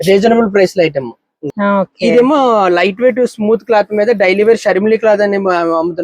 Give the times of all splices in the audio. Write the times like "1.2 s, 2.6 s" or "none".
1.4 s